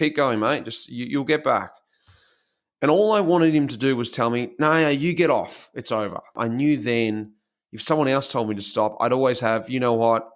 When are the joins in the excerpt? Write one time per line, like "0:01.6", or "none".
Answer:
0:06.3